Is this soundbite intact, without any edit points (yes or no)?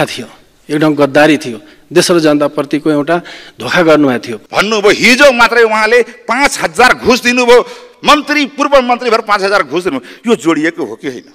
no